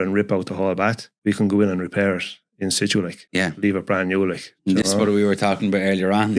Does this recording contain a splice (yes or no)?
yes